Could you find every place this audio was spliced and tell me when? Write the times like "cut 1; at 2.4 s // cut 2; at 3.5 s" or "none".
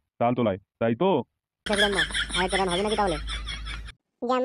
cut 1; at 1.7 s